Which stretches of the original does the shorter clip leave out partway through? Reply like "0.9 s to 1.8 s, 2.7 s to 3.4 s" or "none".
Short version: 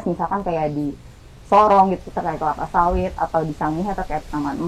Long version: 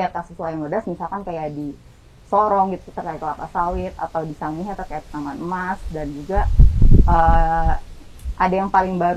none